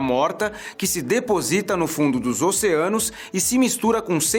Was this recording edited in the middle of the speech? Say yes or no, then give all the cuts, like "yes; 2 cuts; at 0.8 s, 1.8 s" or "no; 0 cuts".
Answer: no; 0 cuts